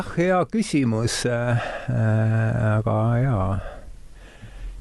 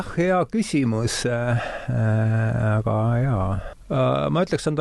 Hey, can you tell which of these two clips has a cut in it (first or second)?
second